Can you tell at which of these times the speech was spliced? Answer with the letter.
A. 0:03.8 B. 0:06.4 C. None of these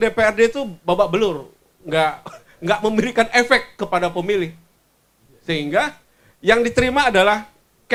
C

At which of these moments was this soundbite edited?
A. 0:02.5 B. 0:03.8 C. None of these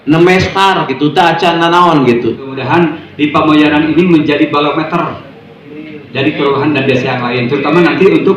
A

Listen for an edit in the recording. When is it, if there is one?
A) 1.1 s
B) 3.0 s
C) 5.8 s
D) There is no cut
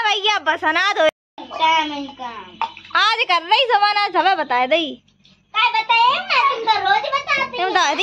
A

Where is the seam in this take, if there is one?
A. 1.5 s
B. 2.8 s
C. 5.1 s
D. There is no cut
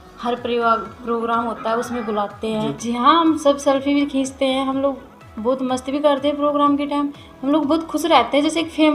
B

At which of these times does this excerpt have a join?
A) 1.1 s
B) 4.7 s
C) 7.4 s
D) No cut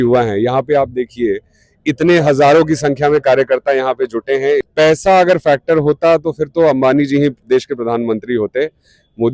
B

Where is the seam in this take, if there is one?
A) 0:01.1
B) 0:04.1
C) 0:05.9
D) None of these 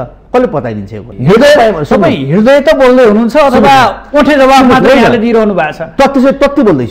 A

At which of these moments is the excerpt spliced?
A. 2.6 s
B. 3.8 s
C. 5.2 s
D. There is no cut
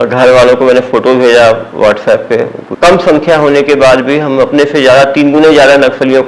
A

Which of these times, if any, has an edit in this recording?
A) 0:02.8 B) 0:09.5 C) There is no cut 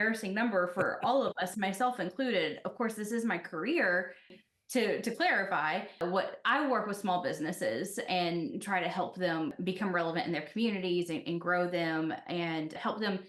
B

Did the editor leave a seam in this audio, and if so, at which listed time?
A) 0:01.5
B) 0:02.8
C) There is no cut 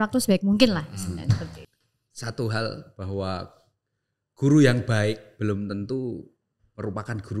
A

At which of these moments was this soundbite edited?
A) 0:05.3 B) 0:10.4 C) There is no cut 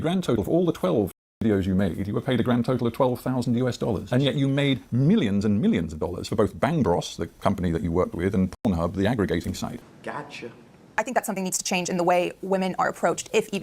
B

